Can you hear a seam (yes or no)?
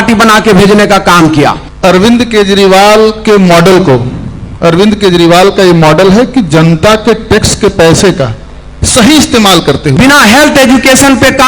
yes